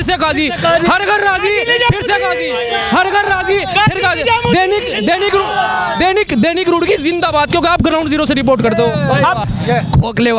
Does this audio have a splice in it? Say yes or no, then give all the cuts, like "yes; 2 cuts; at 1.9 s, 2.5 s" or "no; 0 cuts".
yes; 1 cut; at 9.4 s